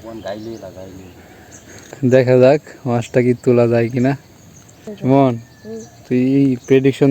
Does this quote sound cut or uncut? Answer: cut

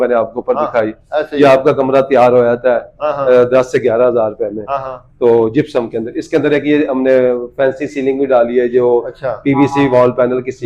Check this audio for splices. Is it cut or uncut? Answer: uncut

